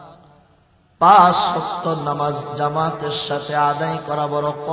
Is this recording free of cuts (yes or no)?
yes